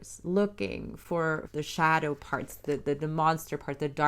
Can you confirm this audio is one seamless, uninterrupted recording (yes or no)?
no